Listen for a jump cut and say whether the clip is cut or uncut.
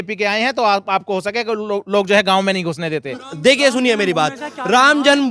uncut